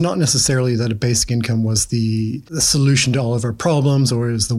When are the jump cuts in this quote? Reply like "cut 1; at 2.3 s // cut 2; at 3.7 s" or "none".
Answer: cut 1; at 2.5 s